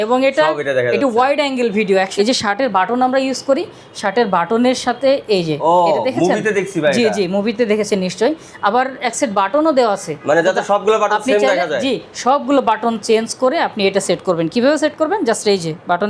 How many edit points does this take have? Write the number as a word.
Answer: one